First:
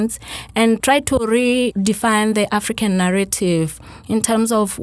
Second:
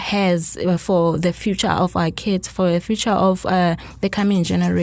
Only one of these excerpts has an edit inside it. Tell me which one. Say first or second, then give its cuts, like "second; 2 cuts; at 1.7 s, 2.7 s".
first; 2 cuts; at 0.8 s, 1.7 s